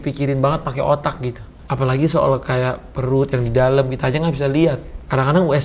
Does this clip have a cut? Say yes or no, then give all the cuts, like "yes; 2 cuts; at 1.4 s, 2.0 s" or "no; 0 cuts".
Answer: no; 0 cuts